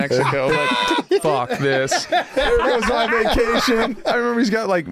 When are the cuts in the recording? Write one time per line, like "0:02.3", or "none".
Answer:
0:01.2
0:04.1